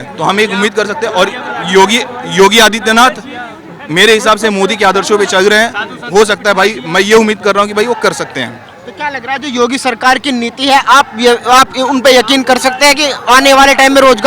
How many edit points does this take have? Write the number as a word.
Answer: zero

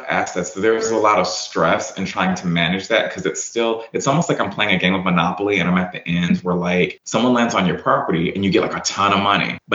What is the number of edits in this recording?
zero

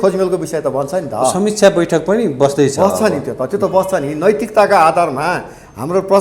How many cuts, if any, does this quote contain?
zero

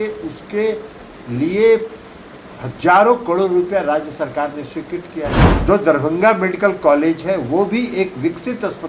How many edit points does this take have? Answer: one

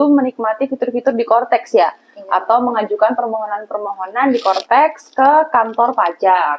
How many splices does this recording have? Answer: zero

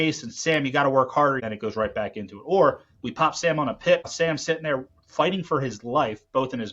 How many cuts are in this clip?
two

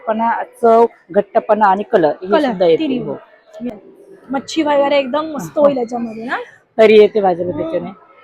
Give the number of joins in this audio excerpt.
one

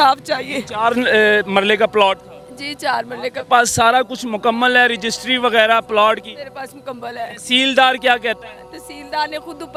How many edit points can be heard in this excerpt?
zero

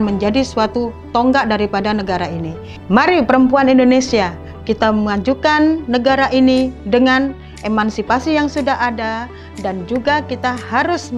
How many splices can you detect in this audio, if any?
zero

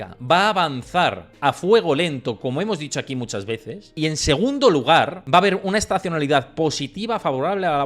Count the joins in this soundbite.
two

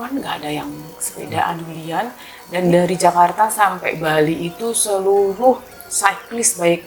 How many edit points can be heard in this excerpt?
one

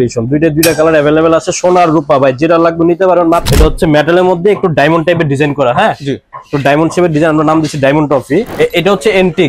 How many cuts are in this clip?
two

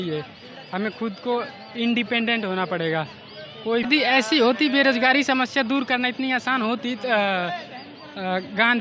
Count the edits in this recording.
one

